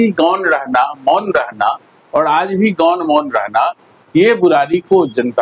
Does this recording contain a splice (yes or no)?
no